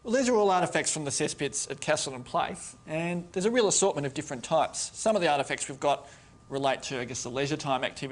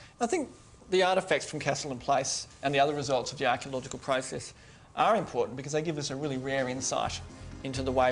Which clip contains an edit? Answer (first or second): first